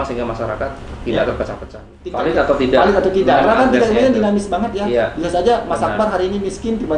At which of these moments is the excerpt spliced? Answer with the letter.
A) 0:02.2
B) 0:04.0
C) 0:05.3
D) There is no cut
A